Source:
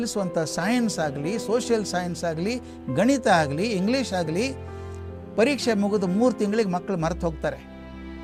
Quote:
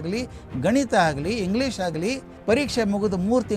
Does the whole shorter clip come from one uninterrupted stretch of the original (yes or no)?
no